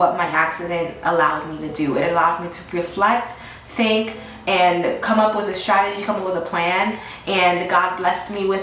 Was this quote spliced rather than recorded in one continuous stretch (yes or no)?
no